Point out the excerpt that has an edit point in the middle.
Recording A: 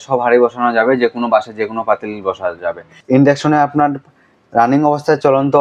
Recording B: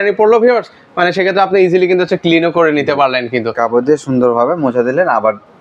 A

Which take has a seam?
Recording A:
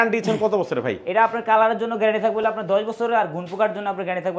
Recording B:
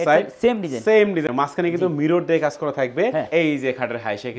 B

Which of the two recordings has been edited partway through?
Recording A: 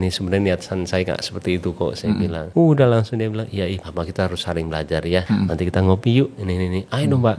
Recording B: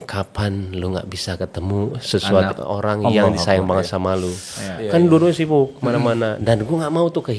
A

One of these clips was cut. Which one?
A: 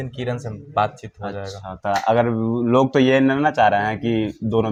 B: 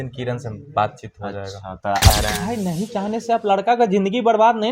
B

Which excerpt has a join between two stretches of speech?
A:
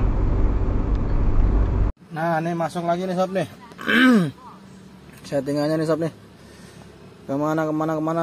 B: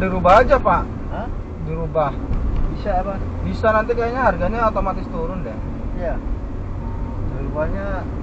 A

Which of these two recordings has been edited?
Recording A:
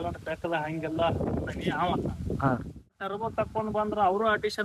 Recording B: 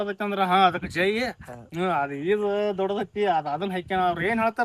A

